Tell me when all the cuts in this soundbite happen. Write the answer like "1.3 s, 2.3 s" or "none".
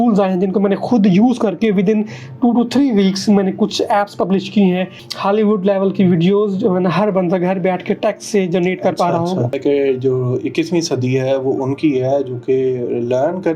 5.0 s, 9.6 s